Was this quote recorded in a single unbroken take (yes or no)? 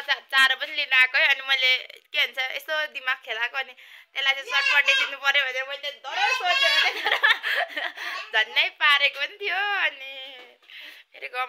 yes